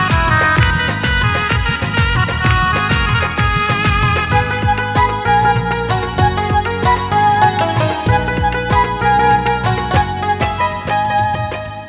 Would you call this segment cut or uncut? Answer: uncut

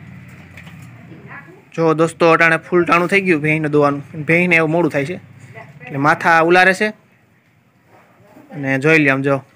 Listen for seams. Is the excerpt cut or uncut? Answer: uncut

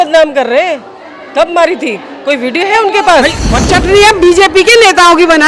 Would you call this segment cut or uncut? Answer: cut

